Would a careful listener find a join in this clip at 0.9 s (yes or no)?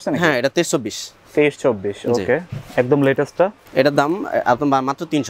no